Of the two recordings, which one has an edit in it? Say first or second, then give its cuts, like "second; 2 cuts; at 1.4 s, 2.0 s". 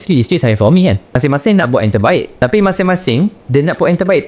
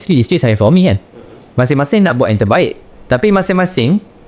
first; 3 cuts; at 1.1 s, 2.3 s, 3.4 s